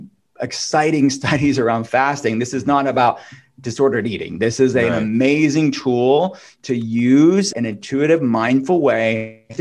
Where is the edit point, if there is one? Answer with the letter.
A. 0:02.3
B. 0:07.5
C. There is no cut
B